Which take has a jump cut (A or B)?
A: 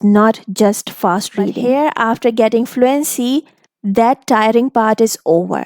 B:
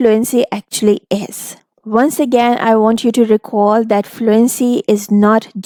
A